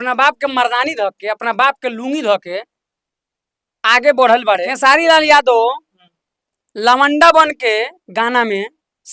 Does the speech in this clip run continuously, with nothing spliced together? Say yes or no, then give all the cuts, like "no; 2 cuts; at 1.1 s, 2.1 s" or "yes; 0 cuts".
no; 1 cut; at 4.7 s